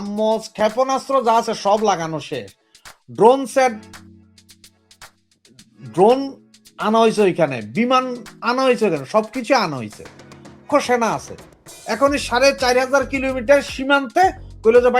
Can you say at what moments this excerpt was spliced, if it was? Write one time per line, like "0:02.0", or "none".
0:10.6